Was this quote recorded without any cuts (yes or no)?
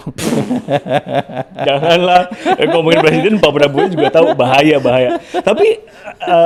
yes